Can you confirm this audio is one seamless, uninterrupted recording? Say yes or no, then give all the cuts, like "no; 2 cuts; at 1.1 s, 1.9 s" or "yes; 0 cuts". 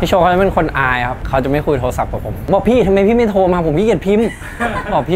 no; 2 cuts; at 1.2 s, 2.4 s